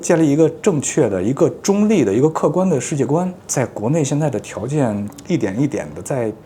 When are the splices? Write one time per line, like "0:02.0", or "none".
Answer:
none